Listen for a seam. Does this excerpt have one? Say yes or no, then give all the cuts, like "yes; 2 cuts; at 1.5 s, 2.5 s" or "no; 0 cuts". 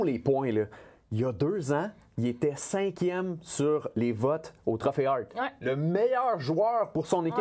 no; 0 cuts